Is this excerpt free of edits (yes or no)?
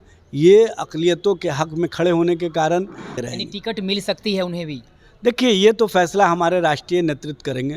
no